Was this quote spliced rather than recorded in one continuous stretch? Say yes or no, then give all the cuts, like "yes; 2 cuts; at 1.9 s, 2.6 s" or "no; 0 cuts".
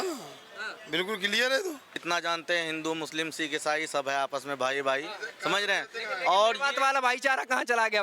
yes; 1 cut; at 2.0 s